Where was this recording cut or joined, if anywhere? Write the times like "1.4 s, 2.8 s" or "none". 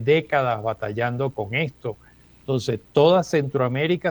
none